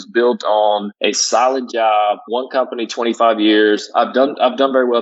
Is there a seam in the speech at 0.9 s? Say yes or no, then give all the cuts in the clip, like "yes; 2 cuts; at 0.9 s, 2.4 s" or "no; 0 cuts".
yes; 1 cut; at 0.9 s